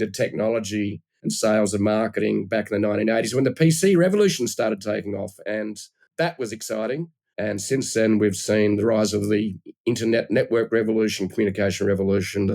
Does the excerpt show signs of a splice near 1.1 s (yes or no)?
yes